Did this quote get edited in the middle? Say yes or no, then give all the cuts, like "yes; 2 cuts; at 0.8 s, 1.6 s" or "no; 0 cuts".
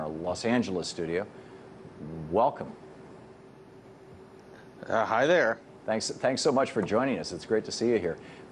yes; 1 cut; at 6.3 s